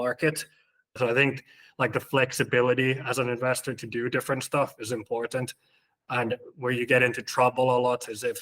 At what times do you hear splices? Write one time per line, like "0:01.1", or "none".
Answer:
0:01.0